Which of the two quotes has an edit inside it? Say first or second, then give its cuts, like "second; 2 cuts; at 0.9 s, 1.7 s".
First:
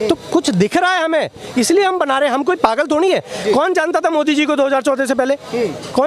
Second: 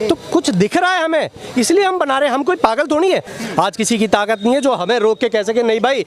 second; 1 cut; at 3.3 s